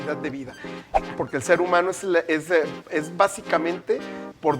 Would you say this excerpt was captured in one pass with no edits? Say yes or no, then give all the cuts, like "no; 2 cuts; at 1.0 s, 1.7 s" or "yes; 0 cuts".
no; 1 cut; at 0.9 s